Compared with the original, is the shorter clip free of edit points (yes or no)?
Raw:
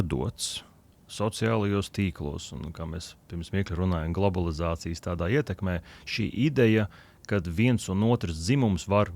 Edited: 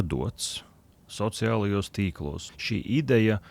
no